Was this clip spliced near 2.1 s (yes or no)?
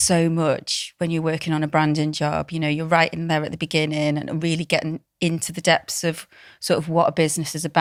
no